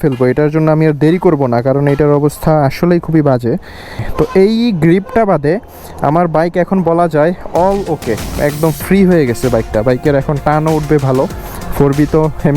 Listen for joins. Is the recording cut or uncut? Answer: cut